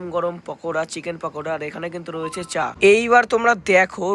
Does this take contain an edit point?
yes; 1 cut; at 2.7 s

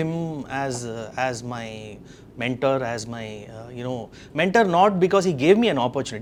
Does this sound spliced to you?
no; 0 cuts

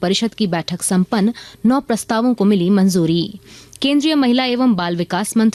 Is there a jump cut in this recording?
no; 0 cuts

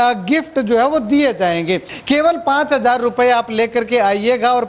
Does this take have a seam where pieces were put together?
yes; 1 cut; at 1.9 s

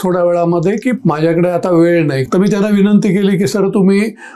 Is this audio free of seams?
no; 2 cuts; at 1.0 s, 2.3 s

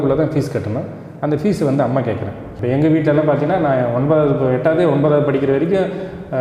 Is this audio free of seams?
no; 1 cut; at 2.5 s

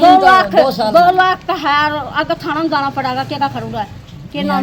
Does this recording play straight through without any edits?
yes; 0 cuts

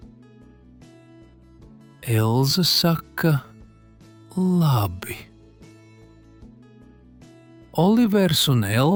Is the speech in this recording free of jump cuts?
yes; 0 cuts

